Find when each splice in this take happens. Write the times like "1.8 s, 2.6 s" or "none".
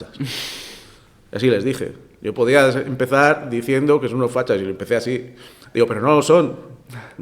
none